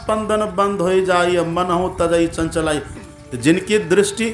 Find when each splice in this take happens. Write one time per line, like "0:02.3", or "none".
0:03.0